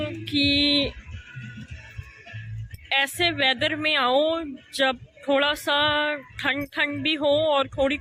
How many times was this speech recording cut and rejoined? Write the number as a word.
zero